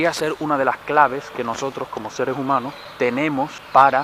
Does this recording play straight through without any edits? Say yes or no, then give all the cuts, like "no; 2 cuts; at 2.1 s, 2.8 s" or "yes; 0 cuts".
no; 1 cut; at 3.1 s